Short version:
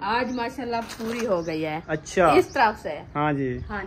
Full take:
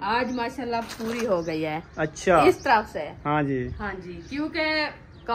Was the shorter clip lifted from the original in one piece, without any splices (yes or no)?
no